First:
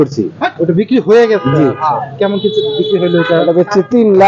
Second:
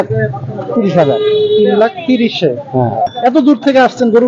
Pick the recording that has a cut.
second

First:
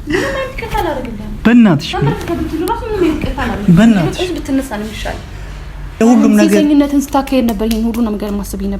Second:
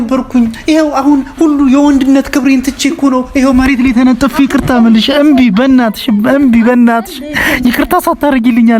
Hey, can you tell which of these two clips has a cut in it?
first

